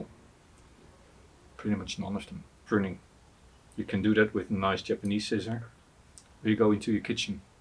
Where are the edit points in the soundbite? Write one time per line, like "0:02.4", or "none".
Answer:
0:02.6